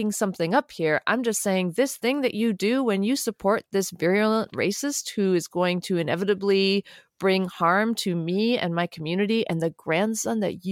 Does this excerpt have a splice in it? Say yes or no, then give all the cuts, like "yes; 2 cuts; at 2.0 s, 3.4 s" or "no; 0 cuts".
no; 0 cuts